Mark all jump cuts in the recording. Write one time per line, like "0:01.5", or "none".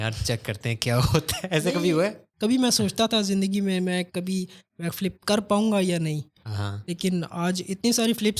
0:02.2